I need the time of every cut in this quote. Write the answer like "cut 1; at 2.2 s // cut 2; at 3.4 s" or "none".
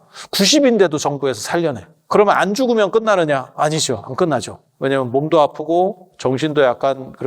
cut 1; at 2.1 s